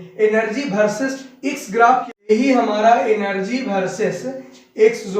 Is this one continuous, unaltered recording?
no; 1 cut; at 2.3 s

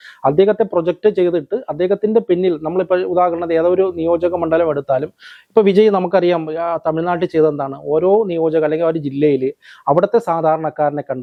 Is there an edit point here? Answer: no; 0 cuts

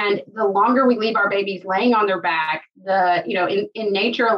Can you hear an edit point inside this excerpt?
no; 0 cuts

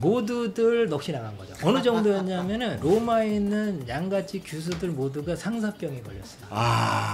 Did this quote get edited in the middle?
yes; 1 cut; at 1.5 s

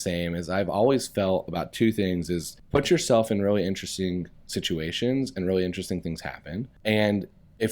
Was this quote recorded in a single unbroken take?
no; 2 cuts; at 2.5 s, 6.7 s

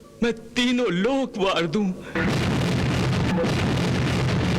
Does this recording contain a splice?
yes; 2 cuts; at 2.1 s, 3.3 s

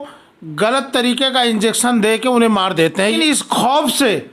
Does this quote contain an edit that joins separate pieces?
yes; 1 cut; at 3.2 s

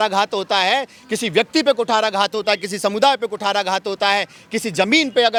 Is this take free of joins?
yes; 0 cuts

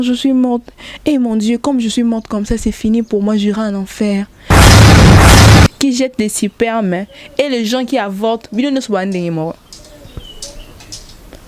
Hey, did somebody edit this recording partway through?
yes; 3 cuts; at 4.3 s, 5.8 s, 9.7 s

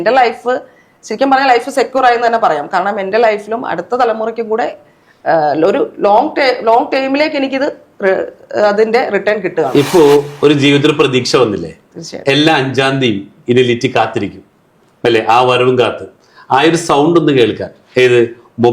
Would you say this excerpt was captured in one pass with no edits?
yes; 0 cuts

